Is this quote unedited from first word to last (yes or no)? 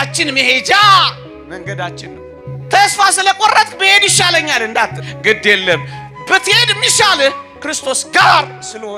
yes